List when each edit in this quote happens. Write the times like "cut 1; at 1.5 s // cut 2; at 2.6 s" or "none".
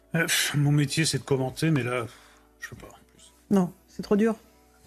none